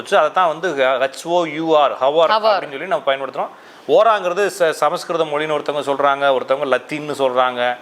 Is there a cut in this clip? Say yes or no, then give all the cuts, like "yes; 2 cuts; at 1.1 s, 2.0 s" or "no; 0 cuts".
no; 0 cuts